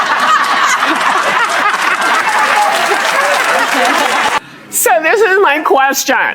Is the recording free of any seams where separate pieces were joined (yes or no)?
no